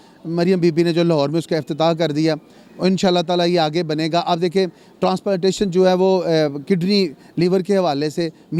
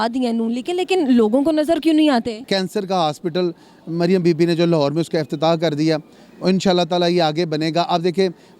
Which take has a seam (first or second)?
second